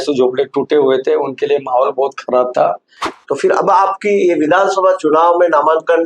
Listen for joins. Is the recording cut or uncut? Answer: cut